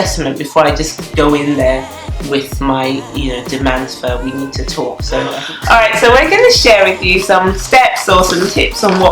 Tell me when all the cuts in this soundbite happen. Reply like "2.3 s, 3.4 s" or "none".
5.5 s

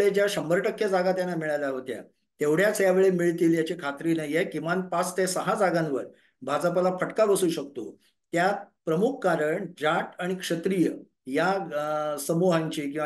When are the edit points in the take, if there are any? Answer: none

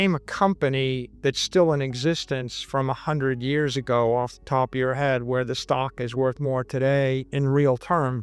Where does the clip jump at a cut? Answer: 1.1 s, 7.3 s

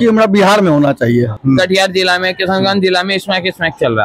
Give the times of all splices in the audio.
1.4 s

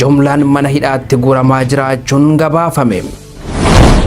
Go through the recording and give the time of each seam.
3.2 s

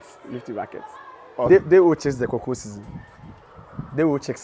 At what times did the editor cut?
1.5 s

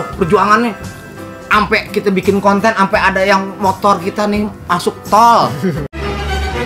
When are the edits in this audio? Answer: none

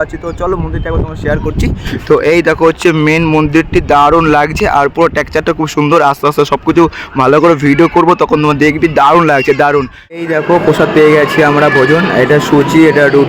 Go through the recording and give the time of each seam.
10.2 s

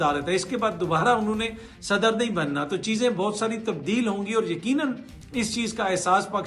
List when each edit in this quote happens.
none

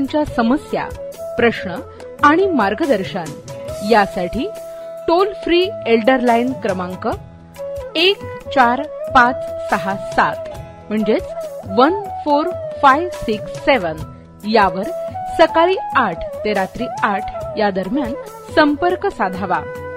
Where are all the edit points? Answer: none

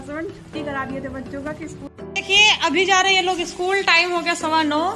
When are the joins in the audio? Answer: 1.8 s

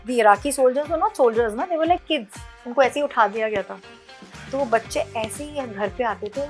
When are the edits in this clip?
none

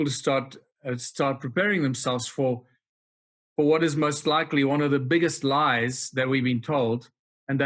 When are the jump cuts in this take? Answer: none

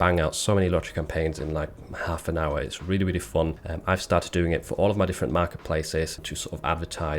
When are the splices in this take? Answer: none

